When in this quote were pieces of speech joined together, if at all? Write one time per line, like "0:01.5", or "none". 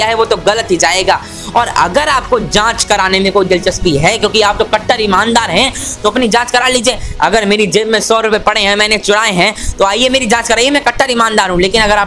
none